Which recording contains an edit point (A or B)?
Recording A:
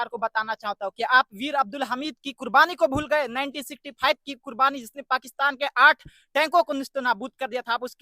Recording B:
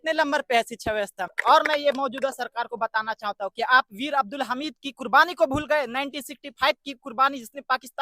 B